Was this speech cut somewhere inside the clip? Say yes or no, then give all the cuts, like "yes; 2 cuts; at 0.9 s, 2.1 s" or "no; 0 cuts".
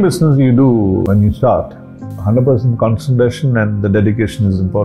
yes; 2 cuts; at 1.1 s, 2.1 s